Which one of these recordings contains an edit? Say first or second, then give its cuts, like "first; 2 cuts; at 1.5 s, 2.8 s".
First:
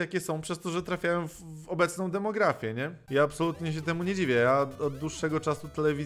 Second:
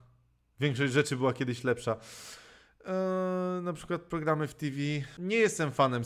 first; 1 cut; at 3.0 s